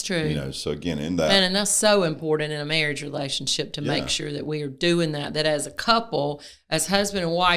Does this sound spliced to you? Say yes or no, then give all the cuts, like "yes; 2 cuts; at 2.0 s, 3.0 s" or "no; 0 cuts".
no; 0 cuts